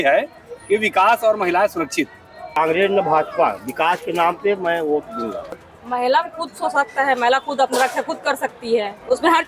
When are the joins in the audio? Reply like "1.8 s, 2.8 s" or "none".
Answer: 2.5 s, 5.5 s